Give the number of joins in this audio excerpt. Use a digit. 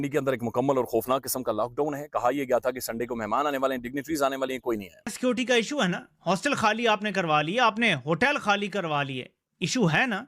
1